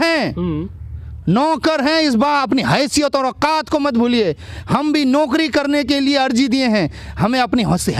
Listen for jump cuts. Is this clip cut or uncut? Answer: uncut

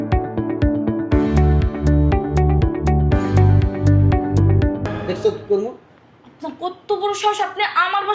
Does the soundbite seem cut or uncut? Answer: cut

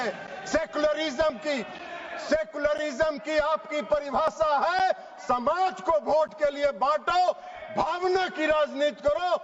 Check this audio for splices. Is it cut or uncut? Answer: uncut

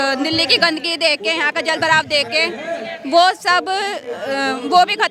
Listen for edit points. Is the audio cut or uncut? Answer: uncut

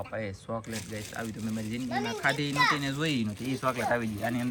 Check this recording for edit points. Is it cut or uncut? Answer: uncut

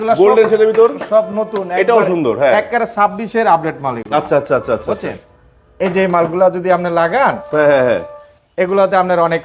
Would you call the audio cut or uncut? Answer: uncut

